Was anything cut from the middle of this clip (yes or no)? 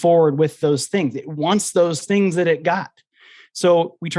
no